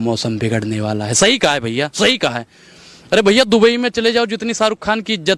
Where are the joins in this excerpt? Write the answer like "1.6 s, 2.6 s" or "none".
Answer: none

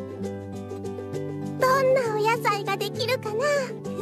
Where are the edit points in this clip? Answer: none

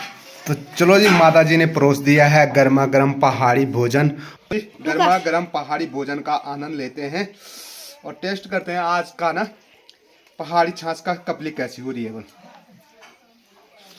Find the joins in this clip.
4.3 s

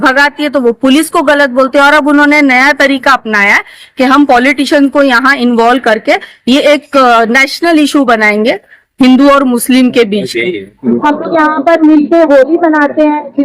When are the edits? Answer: 10.7 s

